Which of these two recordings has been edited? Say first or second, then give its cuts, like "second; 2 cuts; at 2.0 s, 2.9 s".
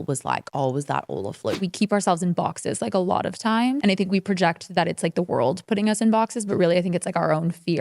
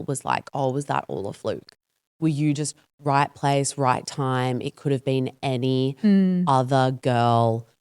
first; 2 cuts; at 1.6 s, 3.8 s